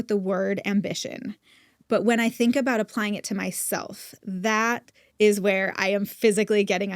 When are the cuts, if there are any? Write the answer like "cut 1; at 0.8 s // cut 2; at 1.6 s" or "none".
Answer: none